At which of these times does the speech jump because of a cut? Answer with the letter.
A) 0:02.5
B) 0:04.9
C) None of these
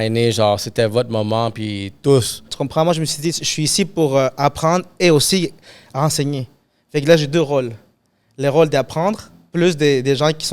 A